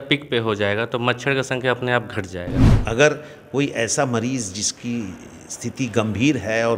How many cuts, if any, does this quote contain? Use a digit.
1